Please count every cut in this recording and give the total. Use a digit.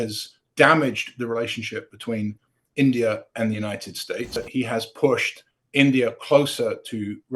1